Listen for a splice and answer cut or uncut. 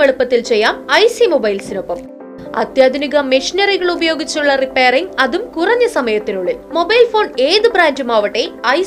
uncut